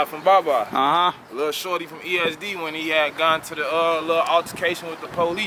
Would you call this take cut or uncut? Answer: uncut